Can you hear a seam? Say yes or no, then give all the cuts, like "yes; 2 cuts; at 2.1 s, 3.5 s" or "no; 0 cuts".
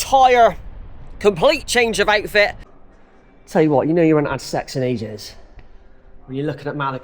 yes; 1 cut; at 2.7 s